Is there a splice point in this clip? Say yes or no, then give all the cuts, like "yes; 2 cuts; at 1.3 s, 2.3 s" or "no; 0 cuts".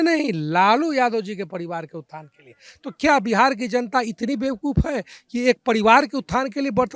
no; 0 cuts